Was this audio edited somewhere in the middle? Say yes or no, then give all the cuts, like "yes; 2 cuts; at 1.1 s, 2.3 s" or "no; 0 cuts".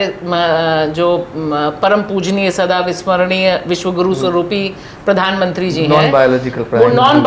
no; 0 cuts